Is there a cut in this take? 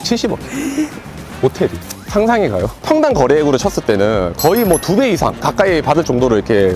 yes; 1 cut; at 2.7 s

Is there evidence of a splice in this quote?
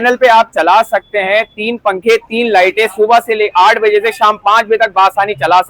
no; 0 cuts

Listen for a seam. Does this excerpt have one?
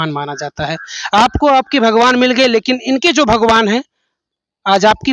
no; 0 cuts

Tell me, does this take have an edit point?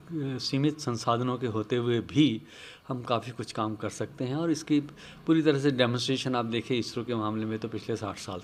no; 0 cuts

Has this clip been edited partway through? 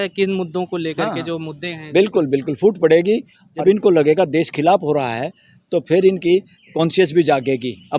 yes; 1 cut; at 3.6 s

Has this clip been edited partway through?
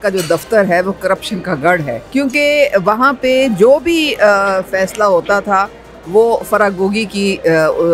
no; 0 cuts

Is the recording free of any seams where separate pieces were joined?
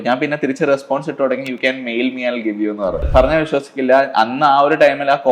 no; 1 cut; at 3.0 s

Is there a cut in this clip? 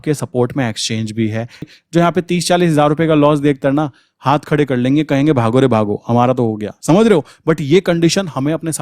yes; 1 cut; at 1.7 s

